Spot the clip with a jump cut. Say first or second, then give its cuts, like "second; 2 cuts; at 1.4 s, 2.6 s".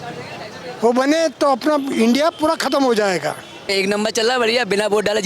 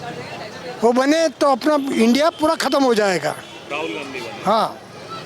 first; 1 cut; at 3.7 s